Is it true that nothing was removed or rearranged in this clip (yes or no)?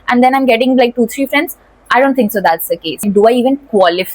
no